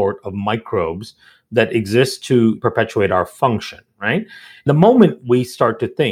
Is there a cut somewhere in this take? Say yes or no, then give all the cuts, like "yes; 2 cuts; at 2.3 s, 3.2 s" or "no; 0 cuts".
yes; 2 cuts; at 2.6 s, 4.6 s